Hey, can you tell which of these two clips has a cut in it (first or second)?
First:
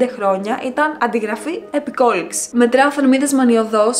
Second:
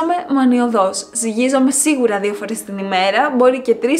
first